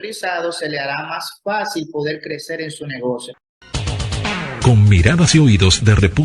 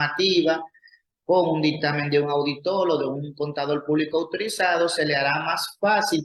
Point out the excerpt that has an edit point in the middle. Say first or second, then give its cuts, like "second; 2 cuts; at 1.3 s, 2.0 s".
first; 1 cut; at 3.3 s